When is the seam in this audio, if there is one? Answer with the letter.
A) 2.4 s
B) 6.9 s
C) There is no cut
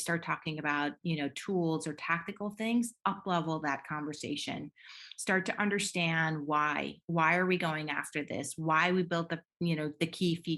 C